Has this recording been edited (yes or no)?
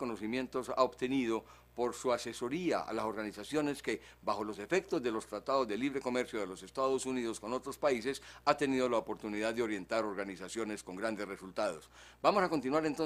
yes